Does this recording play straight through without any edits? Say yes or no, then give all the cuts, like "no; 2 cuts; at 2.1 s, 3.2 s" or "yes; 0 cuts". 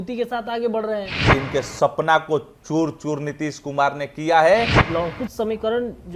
no; 2 cuts; at 1.3 s, 4.8 s